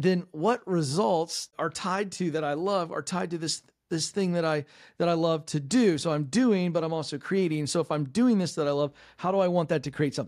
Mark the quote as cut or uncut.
cut